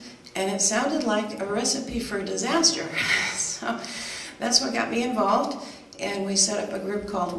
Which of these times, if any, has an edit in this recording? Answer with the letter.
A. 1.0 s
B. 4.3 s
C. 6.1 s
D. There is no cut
A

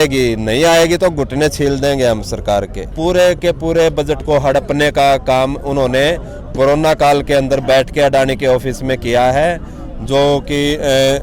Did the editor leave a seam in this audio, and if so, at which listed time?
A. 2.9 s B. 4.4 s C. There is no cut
A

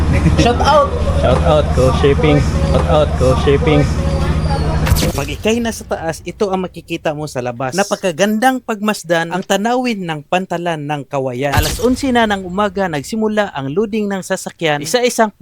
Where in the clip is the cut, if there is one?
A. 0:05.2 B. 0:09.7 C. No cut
A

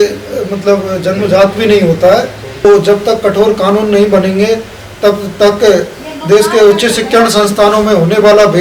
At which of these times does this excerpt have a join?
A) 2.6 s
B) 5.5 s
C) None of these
A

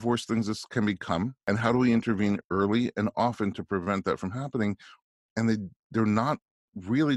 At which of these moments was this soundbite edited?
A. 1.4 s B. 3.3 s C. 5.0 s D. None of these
A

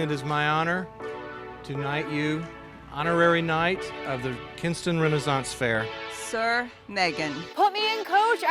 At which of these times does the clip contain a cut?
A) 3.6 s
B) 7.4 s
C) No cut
B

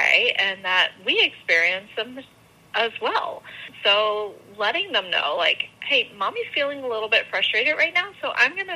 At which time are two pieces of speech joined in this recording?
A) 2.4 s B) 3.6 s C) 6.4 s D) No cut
B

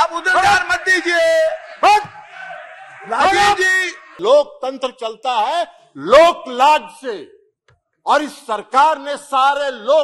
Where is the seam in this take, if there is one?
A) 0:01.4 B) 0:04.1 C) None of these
B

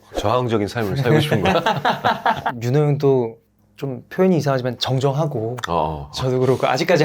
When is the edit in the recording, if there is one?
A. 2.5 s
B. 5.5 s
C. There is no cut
A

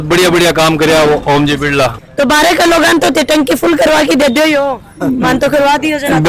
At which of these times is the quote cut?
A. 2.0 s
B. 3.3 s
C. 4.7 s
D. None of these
A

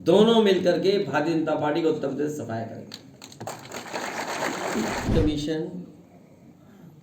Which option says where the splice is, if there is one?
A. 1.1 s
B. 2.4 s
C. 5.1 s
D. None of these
C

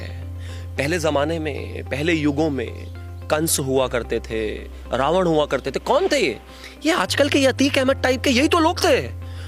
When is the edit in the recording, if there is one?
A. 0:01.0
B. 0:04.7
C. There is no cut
C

